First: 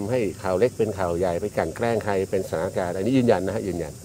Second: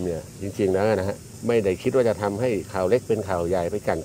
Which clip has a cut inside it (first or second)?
second